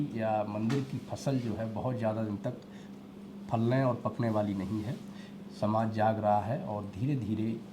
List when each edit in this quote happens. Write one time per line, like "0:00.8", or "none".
none